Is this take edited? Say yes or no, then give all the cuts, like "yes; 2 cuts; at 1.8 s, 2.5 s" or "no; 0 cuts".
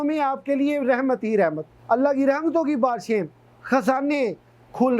yes; 1 cut; at 1.7 s